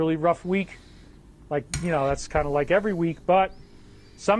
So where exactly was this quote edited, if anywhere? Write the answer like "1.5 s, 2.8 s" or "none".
none